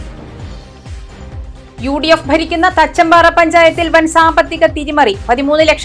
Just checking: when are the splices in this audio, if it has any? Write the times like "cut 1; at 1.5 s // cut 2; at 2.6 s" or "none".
cut 1; at 1.4 s